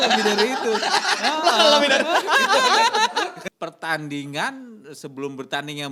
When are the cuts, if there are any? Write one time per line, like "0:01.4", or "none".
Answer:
0:03.4